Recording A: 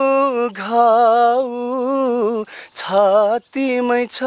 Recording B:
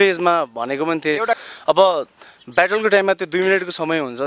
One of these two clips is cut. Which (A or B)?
B